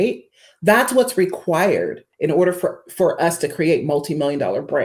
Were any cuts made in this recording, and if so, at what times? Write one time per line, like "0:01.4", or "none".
0:02.1